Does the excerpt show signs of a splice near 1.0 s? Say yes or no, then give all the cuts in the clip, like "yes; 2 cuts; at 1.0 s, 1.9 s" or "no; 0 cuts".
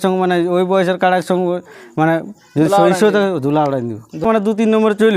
no; 1 cut; at 4.2 s